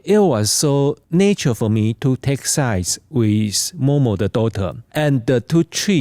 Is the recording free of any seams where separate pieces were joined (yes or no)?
no